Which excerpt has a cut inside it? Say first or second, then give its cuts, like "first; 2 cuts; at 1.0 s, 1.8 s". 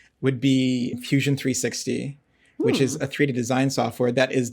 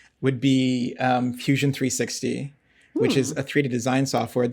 first; 1 cut; at 1.0 s